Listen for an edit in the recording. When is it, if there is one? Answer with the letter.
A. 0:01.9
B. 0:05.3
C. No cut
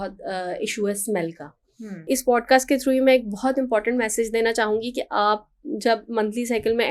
A